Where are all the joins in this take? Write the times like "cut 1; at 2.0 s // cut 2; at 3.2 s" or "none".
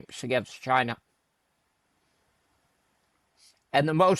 none

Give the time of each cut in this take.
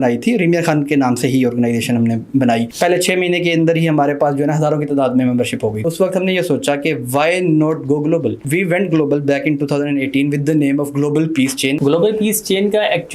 cut 1; at 2.7 s // cut 2; at 5.9 s // cut 3; at 8.4 s // cut 4; at 11.8 s

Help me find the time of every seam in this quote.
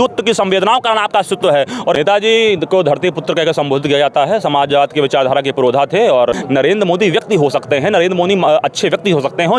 cut 1; at 1.9 s // cut 2; at 6.3 s

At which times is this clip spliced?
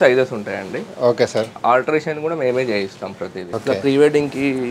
cut 1; at 3.4 s

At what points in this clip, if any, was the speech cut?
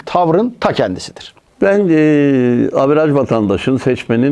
none

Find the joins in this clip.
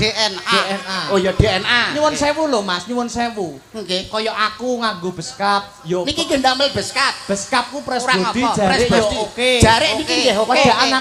none

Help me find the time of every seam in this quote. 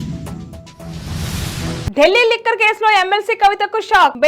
cut 1; at 1.9 s

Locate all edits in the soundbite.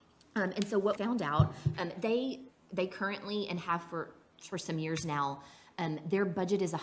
cut 1; at 1.0 s

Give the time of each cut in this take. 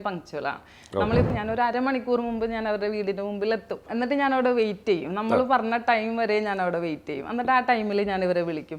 cut 1; at 1.3 s // cut 2; at 3.9 s

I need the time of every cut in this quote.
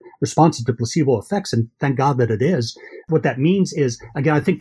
cut 1; at 3.0 s

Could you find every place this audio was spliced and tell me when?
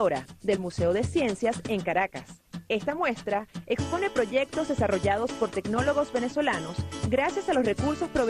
cut 1; at 1.8 s

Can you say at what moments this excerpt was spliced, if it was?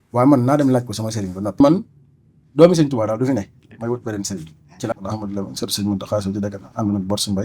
cut 1; at 1.6 s // cut 2; at 4.9 s

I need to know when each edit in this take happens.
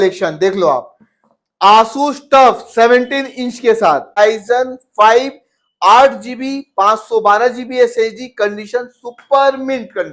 cut 1; at 4.2 s

